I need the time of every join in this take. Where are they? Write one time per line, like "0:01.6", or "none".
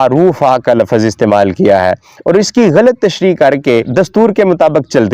0:03.7